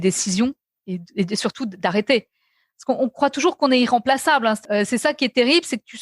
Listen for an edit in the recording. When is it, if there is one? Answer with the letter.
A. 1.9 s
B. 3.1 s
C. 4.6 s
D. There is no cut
C